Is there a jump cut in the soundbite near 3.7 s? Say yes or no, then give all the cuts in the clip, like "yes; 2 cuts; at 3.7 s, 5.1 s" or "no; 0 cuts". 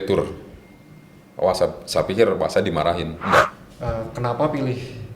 yes; 1 cut; at 3.7 s